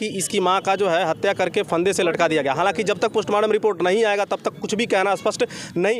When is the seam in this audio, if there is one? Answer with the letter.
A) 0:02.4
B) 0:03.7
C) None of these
C